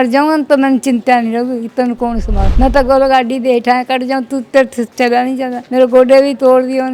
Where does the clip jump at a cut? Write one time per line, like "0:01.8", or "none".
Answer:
0:02.4
0:05.6